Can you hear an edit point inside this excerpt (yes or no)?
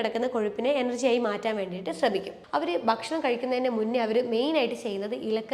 yes